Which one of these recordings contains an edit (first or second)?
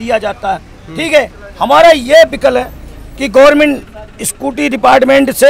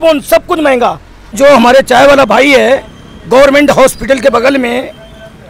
second